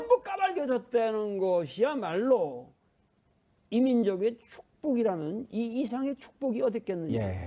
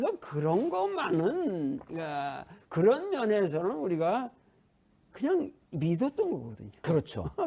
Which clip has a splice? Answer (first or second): second